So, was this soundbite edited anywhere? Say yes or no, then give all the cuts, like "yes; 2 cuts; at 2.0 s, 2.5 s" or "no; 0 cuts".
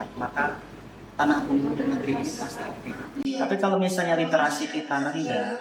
no; 0 cuts